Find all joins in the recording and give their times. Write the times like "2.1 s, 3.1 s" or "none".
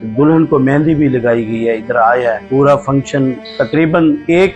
none

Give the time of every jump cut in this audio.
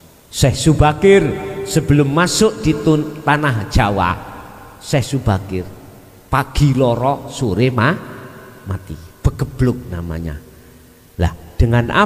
none

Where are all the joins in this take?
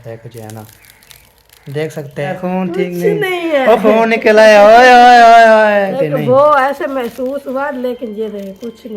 2.4 s, 5.9 s

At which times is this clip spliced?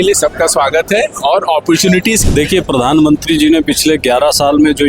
2.2 s

